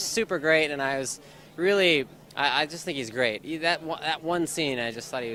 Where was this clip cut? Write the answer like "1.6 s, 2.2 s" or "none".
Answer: none